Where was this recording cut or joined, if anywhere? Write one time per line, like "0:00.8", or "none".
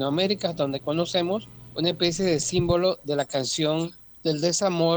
0:01.6
0:04.0